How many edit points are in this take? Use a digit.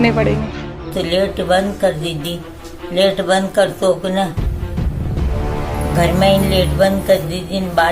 1